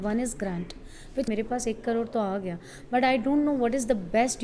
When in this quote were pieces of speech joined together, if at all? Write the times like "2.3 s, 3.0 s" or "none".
1.3 s